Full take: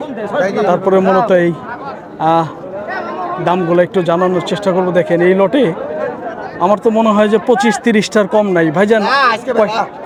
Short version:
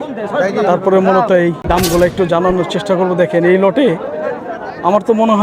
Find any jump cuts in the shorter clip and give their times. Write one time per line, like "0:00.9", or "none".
0:01.6